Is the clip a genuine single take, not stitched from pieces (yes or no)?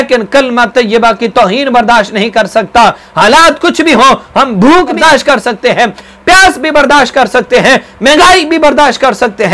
no